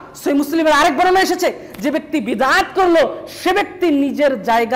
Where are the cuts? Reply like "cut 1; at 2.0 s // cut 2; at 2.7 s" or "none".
none